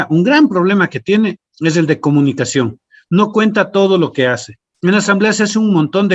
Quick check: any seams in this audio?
no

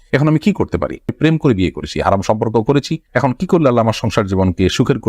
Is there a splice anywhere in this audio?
yes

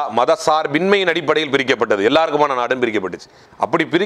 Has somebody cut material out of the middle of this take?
no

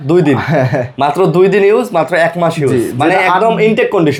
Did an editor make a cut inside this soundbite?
no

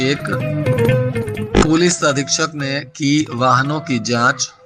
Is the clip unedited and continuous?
yes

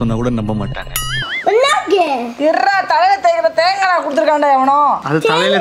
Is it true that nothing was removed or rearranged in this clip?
no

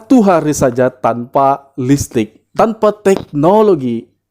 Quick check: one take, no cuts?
no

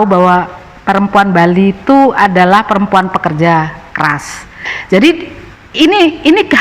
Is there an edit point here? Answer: yes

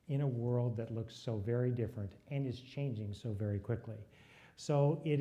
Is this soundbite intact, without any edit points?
no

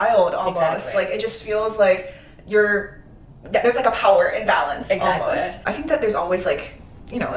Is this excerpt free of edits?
no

